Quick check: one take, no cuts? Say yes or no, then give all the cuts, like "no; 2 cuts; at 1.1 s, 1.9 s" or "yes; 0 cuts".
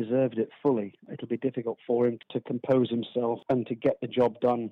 no; 3 cuts; at 1.1 s, 2.2 s, 3.4 s